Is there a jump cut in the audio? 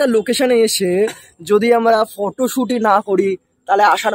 no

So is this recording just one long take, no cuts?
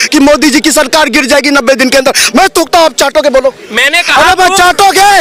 yes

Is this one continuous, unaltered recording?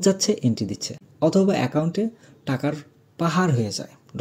no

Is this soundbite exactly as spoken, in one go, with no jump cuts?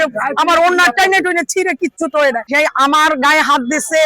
no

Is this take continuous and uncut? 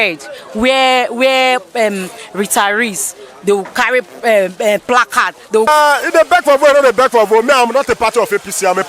no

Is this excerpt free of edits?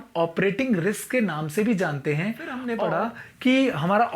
no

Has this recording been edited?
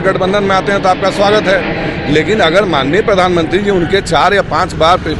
no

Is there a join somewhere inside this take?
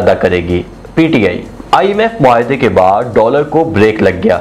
yes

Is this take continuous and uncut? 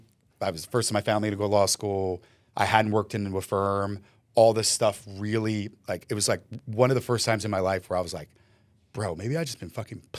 yes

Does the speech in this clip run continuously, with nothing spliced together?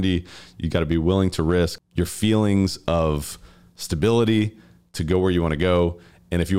yes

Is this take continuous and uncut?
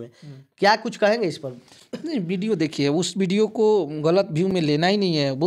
yes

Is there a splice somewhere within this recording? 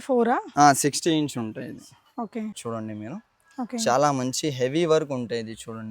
yes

